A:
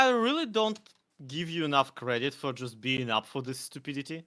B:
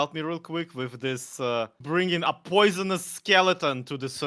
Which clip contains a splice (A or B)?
B